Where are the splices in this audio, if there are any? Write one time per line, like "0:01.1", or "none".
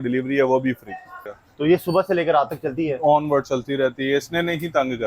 0:01.2